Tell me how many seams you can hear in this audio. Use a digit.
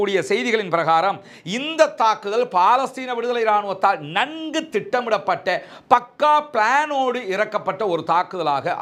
0